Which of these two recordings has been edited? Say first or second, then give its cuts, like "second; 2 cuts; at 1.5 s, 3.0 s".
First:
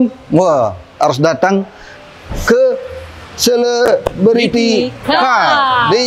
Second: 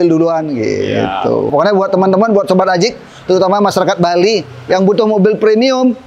second; 1 cut; at 1.5 s